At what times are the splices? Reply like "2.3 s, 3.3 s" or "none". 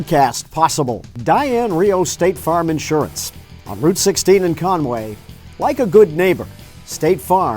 1.0 s